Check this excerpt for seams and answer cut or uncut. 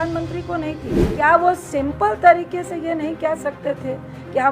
cut